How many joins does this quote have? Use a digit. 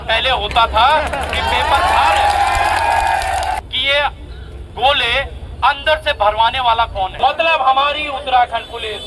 2